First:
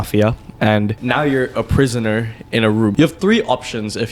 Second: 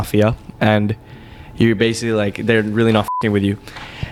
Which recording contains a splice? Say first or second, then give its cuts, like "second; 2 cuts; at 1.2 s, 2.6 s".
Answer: first; 2 cuts; at 1.0 s, 2.9 s